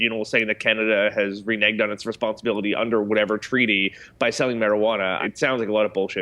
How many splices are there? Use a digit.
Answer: 1